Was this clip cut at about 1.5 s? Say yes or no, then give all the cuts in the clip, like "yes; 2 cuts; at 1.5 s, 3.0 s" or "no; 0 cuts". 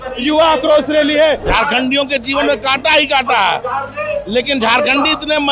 yes; 1 cut; at 1.5 s